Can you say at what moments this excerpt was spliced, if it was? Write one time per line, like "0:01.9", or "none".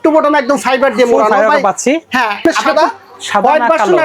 0:02.4